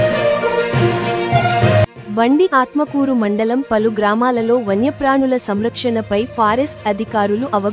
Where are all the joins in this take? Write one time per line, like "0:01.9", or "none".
none